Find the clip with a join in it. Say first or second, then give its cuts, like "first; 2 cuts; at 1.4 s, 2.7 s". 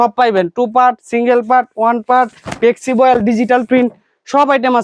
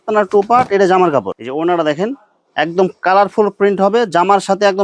second; 1 cut; at 1.3 s